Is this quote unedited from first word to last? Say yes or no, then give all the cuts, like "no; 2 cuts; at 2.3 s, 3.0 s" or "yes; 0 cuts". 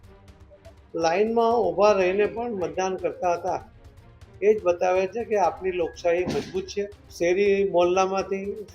no; 1 cut; at 7.0 s